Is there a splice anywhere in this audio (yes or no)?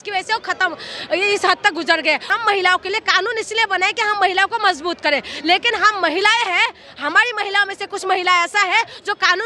yes